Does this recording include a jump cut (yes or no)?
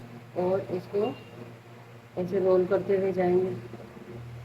no